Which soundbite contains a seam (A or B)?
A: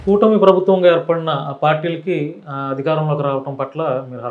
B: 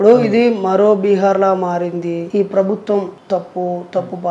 B